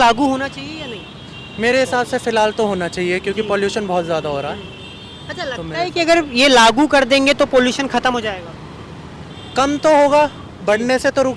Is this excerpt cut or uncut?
uncut